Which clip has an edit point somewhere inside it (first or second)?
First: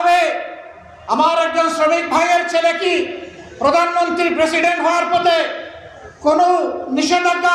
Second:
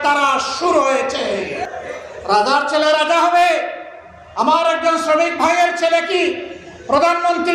second